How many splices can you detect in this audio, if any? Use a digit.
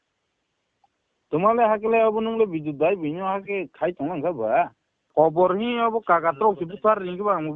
1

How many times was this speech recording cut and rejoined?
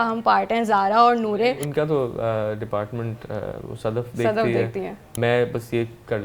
2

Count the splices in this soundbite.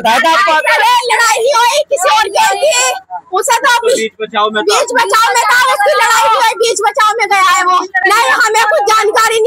1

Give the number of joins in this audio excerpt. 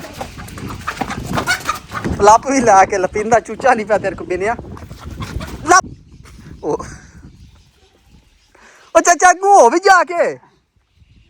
1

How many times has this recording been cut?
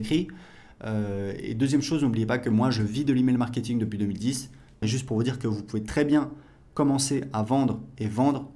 1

